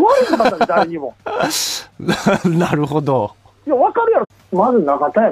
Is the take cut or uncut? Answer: uncut